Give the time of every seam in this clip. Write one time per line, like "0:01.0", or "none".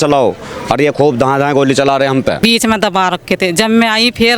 0:02.4